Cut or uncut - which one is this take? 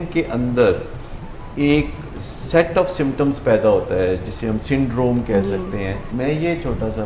cut